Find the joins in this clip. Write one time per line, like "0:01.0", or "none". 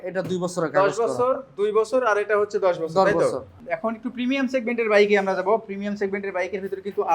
0:03.5